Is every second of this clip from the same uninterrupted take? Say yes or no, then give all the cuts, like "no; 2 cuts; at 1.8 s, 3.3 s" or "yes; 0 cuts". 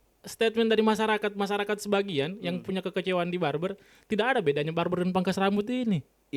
yes; 0 cuts